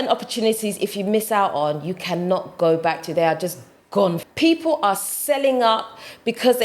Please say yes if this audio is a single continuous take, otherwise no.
no